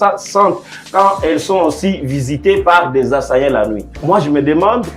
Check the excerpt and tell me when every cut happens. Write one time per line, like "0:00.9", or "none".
0:03.9